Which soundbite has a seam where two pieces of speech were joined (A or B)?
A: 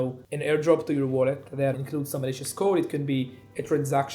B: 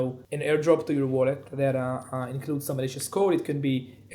A